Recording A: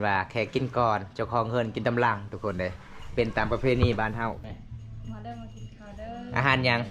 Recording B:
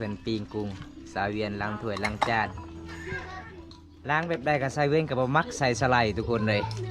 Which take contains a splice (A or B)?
A